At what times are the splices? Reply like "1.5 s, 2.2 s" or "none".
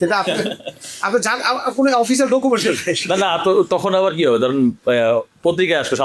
none